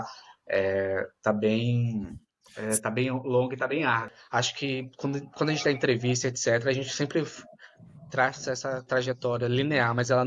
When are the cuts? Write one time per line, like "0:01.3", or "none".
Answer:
0:04.1